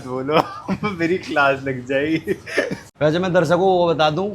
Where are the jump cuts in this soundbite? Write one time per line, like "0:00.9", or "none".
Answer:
0:02.8